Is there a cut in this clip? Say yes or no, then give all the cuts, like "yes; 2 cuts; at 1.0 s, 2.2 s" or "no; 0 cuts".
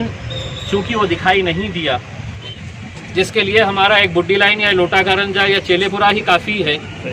yes; 1 cut; at 2.6 s